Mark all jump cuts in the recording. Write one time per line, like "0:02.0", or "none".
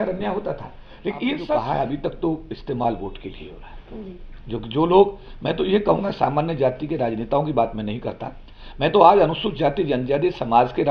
0:01.4